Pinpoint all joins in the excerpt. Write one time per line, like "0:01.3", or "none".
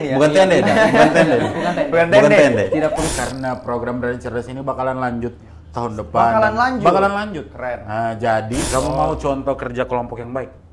0:03.1
0:08.6